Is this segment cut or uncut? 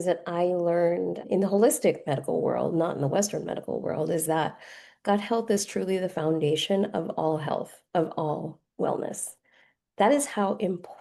uncut